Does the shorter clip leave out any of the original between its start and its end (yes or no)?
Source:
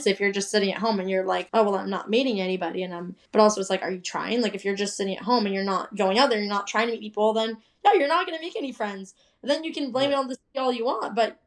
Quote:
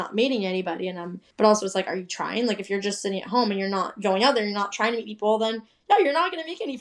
no